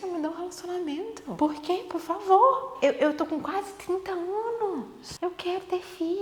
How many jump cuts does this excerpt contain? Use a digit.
3